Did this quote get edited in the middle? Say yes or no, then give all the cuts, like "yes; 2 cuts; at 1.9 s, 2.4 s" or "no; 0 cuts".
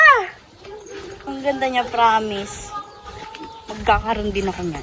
no; 0 cuts